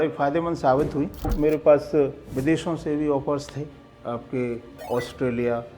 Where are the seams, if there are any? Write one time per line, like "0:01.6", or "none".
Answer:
0:01.3
0:02.2
0:04.7

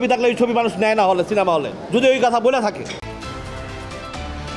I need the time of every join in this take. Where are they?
none

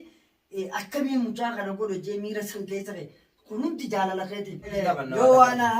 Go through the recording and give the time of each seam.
0:04.7

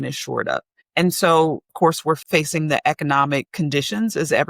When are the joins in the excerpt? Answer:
0:01.8
0:03.5

